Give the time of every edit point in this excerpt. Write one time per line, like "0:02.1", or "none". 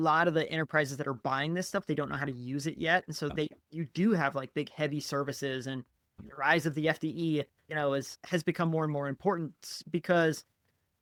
none